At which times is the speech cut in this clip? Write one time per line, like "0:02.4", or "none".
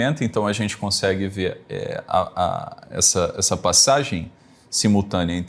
none